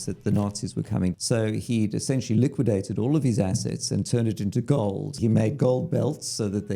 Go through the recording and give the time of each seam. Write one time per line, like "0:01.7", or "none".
0:01.2
0:05.2